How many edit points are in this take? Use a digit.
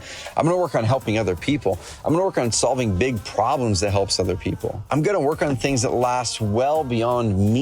1